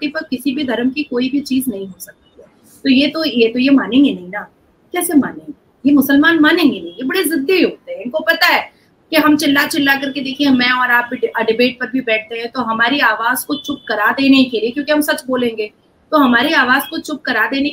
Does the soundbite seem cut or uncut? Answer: uncut